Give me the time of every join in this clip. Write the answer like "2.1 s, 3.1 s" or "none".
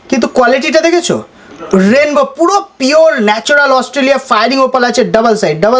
none